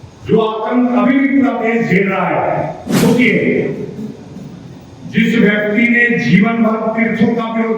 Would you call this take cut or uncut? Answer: cut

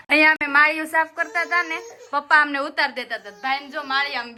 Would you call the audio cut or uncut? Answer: uncut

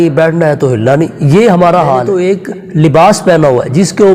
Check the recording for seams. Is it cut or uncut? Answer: cut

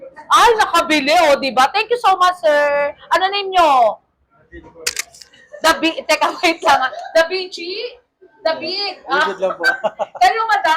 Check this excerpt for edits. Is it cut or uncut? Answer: uncut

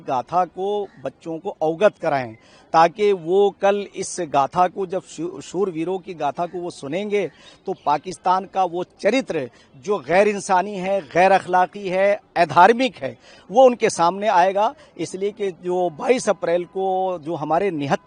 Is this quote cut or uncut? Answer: uncut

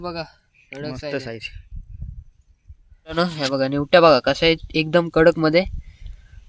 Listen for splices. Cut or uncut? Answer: cut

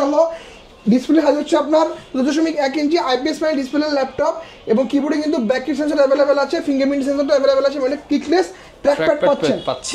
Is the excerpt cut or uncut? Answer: uncut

